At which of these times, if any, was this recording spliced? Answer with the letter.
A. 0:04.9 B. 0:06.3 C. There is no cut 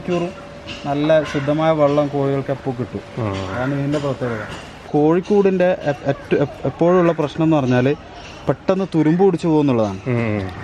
A